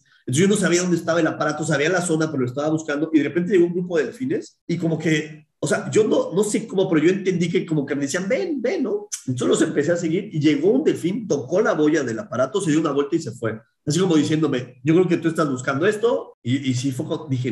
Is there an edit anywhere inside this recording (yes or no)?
yes